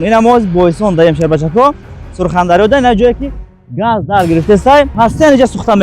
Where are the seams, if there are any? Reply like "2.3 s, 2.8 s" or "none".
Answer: 4.9 s